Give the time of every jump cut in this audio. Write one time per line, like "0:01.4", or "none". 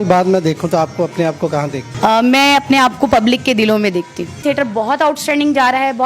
0:01.9
0:04.4

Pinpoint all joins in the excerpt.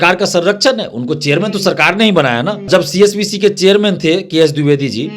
0:02.6

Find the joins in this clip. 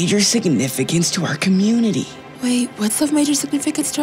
0:02.2

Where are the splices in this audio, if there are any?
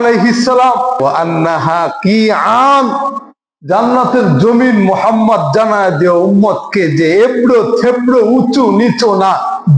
0:01.0

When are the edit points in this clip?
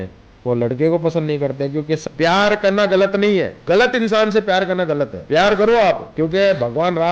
0:02.0
0:03.5
0:05.2
0:06.1

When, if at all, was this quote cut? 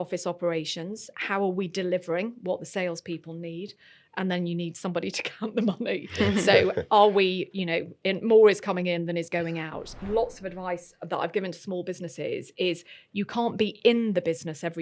0:10.0

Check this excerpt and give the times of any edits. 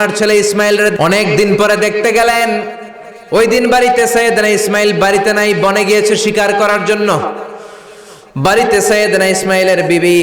0:00.9

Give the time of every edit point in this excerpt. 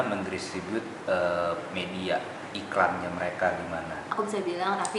0:04.0

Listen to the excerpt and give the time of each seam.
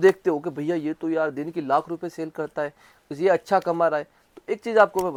none

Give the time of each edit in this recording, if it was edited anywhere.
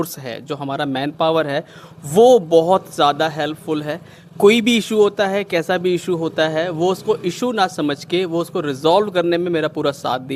none

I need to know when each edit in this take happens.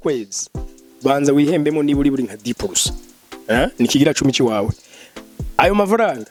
none

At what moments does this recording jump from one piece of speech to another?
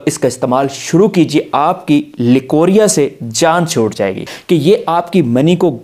0:04.3

